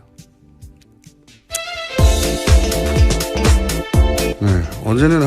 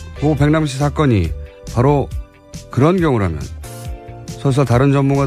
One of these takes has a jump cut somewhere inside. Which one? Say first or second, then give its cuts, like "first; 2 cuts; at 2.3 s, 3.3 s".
first; 1 cut; at 1.4 s